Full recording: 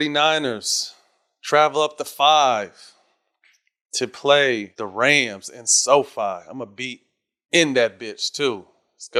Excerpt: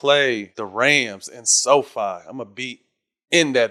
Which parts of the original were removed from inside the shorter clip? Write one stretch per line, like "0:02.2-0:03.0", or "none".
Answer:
none

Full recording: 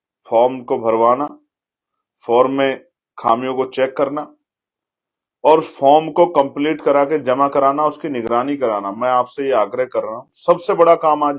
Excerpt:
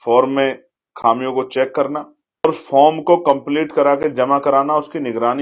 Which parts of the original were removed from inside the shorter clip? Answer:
0:04.7-0:05.5

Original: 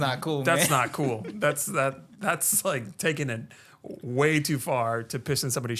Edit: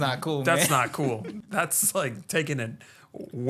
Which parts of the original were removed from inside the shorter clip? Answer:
0:01.3-0:02.0

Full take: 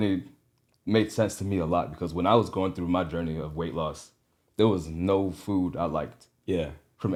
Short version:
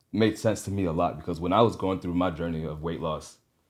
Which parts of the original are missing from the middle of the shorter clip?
none

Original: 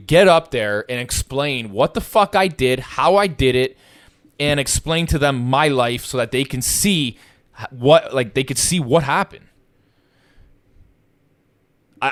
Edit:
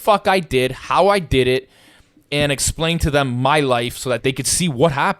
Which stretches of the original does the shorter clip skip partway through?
0:06.3-0:08.3

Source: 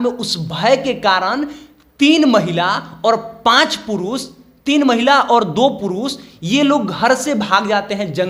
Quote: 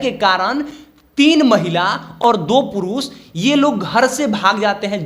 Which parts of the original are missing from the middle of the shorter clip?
0:03.0-0:05.3

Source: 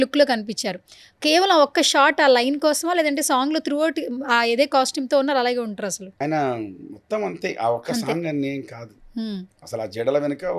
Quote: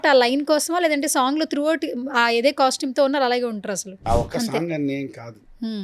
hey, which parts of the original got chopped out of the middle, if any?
0:06.1-0:07.5

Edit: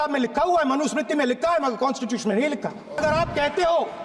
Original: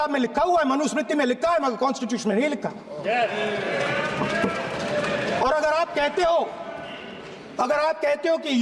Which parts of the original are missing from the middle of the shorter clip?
0:03.0-0:05.6

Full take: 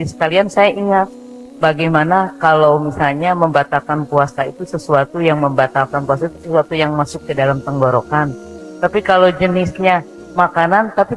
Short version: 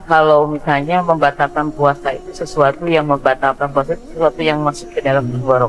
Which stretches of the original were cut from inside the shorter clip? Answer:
none

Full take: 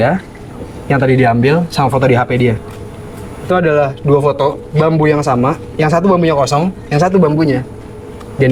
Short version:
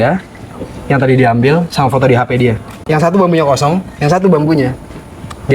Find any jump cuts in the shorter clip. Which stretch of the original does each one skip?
0:02.8-0:05.7

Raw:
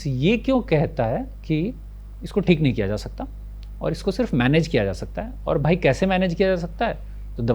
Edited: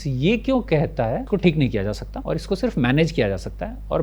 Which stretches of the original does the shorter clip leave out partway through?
0:01.2-0:02.3
0:03.1-0:03.7

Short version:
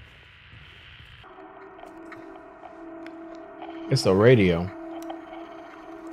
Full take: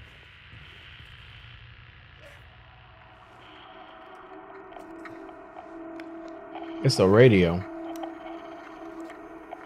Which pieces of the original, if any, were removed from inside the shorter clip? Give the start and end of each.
0:01.2-0:04.2

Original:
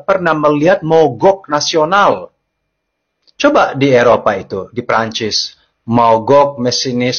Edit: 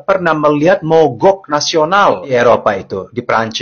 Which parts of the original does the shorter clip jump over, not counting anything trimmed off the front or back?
0:02.3-0:03.9

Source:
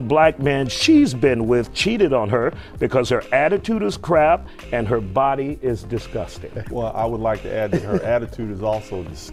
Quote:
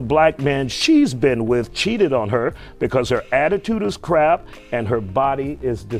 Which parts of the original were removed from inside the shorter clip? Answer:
none

